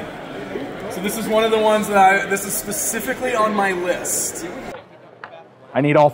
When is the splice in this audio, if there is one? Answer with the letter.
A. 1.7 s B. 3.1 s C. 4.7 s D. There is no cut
C